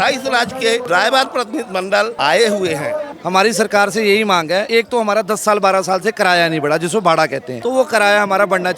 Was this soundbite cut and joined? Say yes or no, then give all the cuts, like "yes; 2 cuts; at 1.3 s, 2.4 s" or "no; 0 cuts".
yes; 5 cuts; at 0.8 s, 2.1 s, 3.1 s, 4.7 s, 7.5 s